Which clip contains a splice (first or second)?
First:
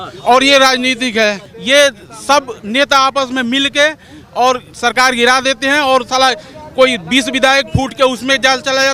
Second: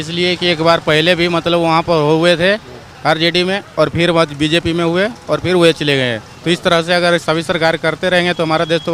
first